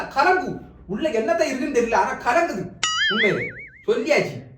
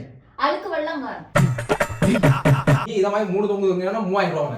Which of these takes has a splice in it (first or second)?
second